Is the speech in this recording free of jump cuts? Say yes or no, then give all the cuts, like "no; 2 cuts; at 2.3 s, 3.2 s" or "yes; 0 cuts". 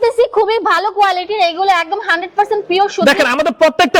yes; 0 cuts